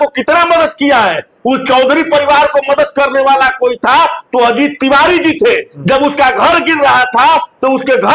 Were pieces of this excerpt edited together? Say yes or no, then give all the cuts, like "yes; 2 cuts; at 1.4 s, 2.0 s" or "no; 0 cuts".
no; 0 cuts